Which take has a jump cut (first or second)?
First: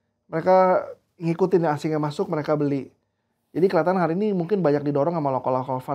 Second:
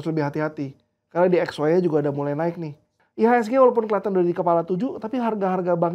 second